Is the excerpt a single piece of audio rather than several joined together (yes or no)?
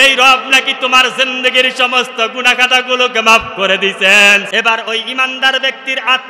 no